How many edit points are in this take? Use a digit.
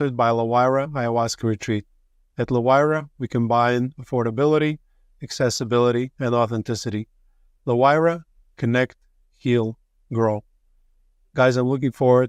0